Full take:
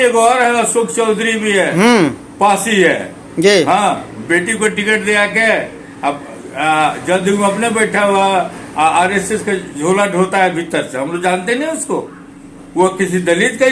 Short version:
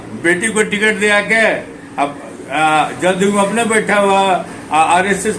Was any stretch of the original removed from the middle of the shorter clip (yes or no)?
no